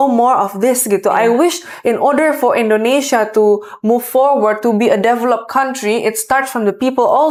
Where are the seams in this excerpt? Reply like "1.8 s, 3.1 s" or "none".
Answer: none